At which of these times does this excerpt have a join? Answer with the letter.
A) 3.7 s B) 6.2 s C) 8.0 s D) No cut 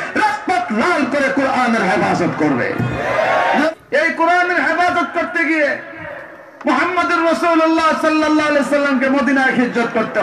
A